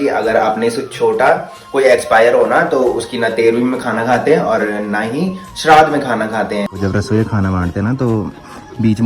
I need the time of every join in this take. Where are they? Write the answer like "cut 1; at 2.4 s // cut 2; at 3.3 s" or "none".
cut 1; at 6.7 s